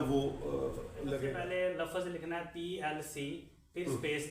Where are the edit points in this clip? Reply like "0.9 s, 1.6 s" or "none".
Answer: 1.4 s